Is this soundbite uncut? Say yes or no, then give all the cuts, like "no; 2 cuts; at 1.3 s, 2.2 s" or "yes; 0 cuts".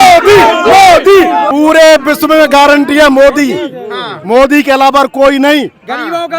no; 1 cut; at 1.5 s